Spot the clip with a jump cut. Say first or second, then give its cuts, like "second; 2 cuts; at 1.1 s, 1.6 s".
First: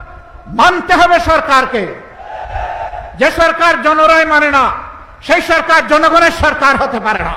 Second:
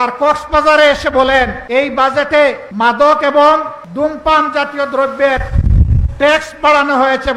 second; 3 cuts; at 1.6 s, 2.6 s, 3.8 s